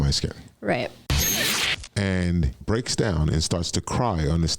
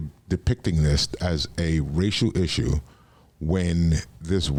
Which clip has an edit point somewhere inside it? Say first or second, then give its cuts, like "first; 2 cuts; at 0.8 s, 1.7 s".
first; 2 cuts; at 1.4 s, 2.6 s